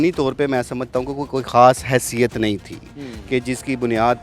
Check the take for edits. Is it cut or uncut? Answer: uncut